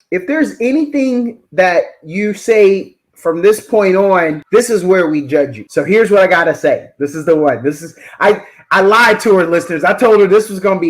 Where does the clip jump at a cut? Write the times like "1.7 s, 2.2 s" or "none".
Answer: 4.4 s, 5.6 s